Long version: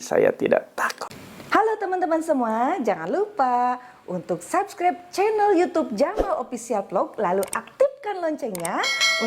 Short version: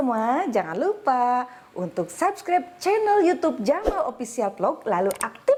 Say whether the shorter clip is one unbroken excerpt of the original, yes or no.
yes